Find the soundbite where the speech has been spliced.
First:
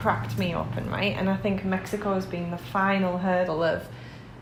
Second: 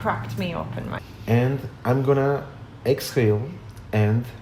second; 1 cut; at 1.0 s

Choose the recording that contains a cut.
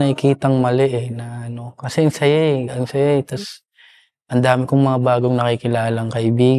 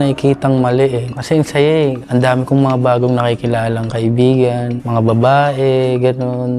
second; 3 cuts; at 1.1 s, 2.0 s, 4.8 s

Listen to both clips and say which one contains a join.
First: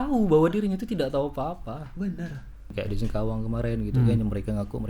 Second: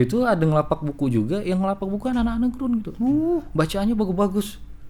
first; 1 cut; at 2.7 s

